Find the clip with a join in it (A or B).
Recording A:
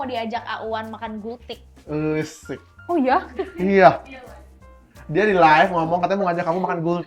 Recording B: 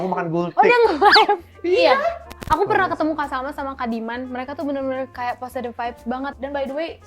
B